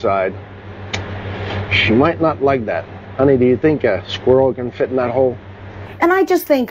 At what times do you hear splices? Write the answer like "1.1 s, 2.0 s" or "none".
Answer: 5.8 s